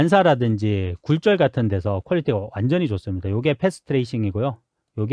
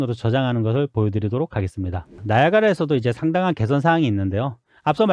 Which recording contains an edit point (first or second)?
second